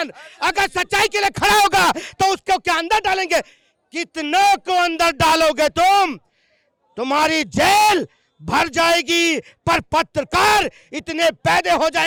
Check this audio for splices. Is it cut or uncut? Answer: uncut